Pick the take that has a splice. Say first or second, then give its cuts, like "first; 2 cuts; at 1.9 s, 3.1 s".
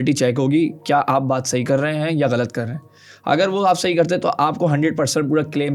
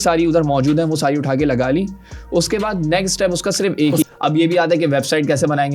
second; 1 cut; at 4.0 s